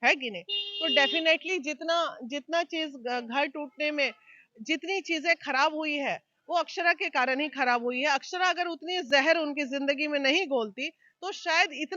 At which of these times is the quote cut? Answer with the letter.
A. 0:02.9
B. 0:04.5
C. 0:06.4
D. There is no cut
D